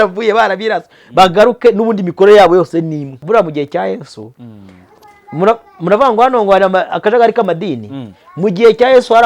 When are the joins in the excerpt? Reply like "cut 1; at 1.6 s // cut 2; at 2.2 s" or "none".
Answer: cut 1; at 3.2 s

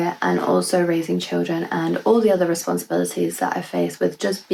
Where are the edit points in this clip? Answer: none

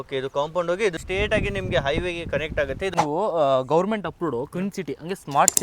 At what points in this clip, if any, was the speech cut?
cut 1; at 1.0 s // cut 2; at 2.9 s

